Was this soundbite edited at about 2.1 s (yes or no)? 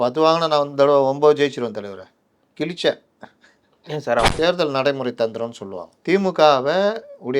no